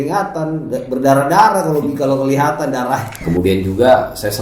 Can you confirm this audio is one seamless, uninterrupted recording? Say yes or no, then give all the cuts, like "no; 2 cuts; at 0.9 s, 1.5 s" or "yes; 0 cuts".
no; 1 cut; at 3.1 s